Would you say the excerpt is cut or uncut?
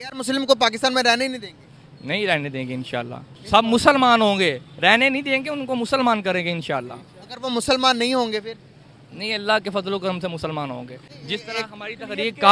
uncut